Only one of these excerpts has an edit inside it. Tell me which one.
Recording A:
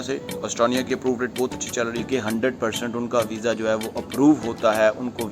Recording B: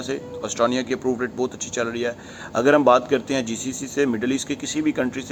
A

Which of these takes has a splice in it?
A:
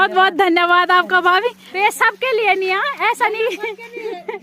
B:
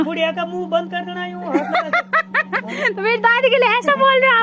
A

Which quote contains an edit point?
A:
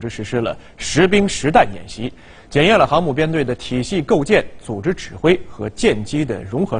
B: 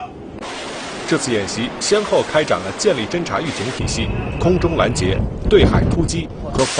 B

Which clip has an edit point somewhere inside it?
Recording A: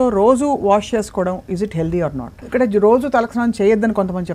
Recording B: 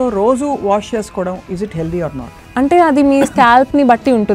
B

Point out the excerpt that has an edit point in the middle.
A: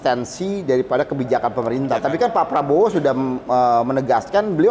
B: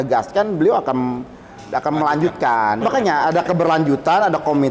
B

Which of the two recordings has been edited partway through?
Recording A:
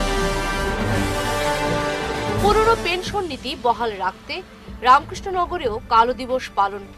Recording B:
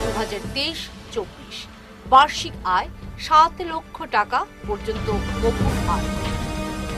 A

